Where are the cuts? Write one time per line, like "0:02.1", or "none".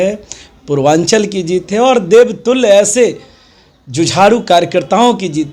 none